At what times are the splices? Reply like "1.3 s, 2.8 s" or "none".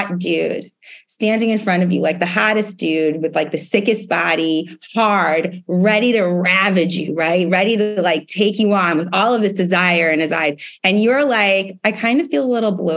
none